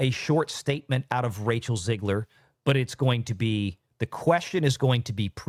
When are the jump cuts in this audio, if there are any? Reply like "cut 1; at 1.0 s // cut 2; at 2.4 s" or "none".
none

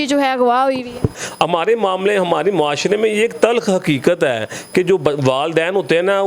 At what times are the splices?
cut 1; at 1.1 s

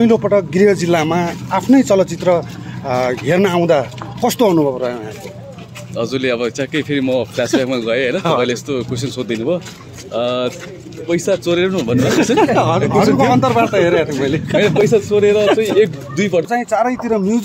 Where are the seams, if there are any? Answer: cut 1; at 16.4 s

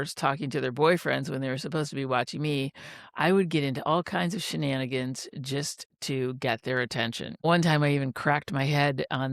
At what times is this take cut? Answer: cut 1; at 7.5 s

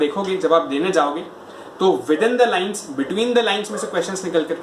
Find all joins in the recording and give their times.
none

